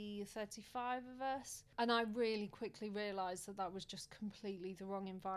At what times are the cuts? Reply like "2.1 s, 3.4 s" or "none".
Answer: 1.6 s

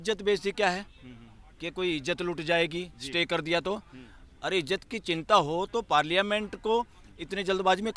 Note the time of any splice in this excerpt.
none

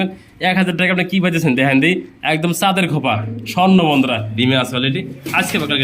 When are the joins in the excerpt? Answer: 4.4 s

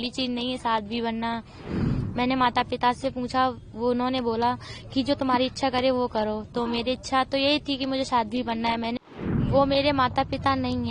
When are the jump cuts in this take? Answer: 1.6 s, 9.0 s

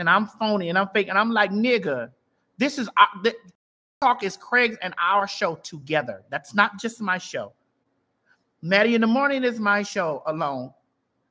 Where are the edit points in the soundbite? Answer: none

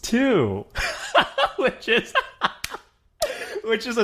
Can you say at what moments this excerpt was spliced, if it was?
none

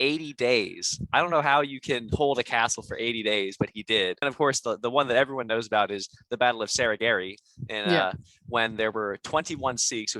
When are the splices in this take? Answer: 4.2 s

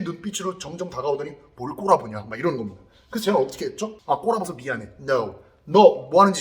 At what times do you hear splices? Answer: 3.9 s

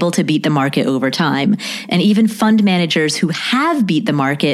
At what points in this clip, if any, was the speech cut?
none

